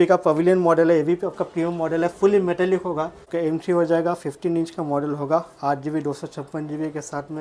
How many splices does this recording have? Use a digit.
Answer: 1